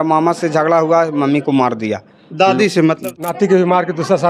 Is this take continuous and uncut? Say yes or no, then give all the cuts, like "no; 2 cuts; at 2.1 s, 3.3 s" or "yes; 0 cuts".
no; 1 cut; at 3.0 s